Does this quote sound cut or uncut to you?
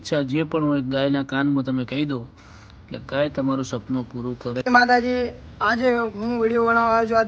cut